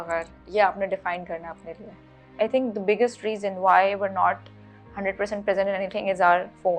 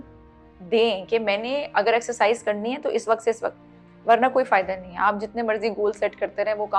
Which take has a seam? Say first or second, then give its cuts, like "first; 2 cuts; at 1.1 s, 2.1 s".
first; 1 cut; at 2.3 s